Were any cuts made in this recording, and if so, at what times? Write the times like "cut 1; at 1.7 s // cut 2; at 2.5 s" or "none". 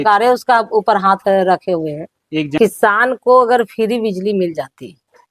cut 1; at 2.5 s